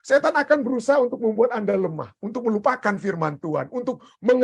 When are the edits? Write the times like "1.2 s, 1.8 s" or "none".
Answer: none